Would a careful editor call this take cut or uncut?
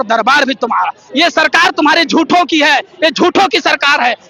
uncut